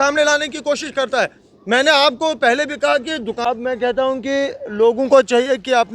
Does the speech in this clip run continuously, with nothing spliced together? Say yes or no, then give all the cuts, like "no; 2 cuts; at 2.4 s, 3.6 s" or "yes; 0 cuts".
no; 1 cut; at 3.4 s